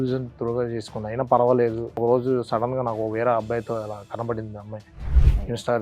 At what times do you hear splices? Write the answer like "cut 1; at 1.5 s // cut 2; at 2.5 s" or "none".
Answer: cut 1; at 2.0 s